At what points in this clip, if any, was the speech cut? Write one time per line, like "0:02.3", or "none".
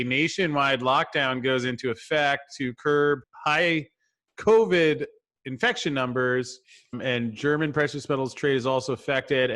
0:03.2
0:07.0

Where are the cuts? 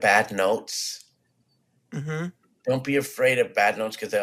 none

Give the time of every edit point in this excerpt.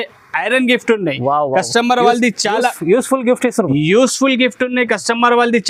none

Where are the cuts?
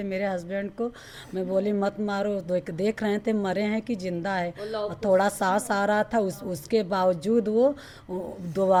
none

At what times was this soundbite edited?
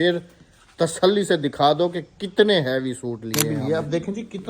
0:03.4

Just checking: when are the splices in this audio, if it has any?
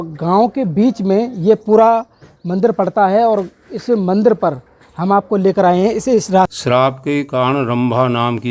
0:06.5

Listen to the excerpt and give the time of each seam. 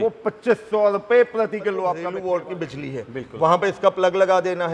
0:02.0

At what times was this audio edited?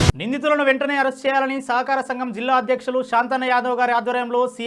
none

